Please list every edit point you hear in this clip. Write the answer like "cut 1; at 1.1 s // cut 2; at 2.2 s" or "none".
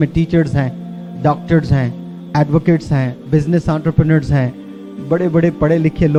none